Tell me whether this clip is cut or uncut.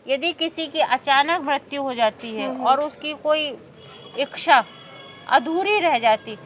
uncut